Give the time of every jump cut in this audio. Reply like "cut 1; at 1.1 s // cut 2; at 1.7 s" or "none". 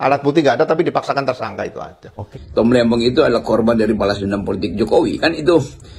cut 1; at 2.2 s